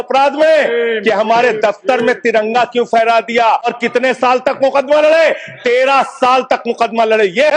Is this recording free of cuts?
no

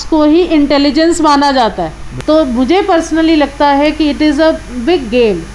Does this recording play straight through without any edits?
yes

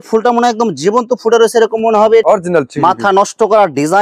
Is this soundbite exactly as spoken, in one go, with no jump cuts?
no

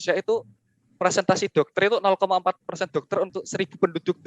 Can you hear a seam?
yes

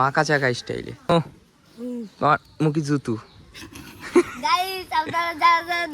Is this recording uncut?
no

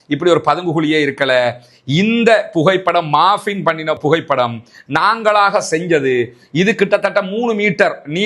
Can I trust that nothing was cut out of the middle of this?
yes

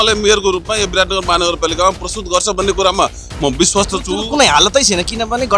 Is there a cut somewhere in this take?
no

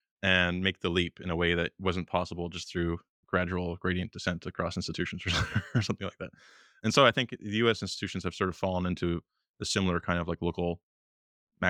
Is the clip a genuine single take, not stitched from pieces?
yes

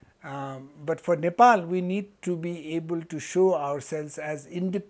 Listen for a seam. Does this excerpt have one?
no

